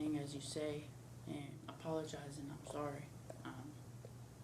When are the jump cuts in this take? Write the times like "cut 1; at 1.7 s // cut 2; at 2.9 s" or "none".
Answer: cut 1; at 1.6 s